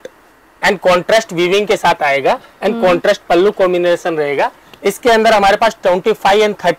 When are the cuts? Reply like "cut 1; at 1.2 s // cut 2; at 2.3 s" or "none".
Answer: none